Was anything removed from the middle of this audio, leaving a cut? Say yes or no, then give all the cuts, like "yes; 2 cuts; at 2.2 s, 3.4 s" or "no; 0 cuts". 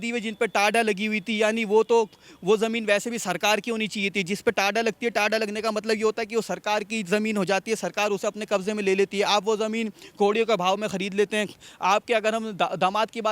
no; 0 cuts